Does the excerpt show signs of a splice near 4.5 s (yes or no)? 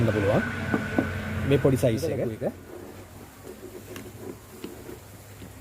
no